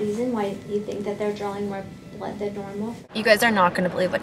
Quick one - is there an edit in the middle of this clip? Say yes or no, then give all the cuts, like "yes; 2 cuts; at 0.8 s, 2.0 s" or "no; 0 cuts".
yes; 1 cut; at 3.0 s